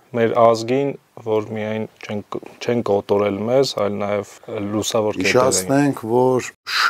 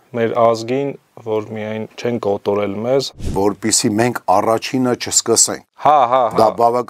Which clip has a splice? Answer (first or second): second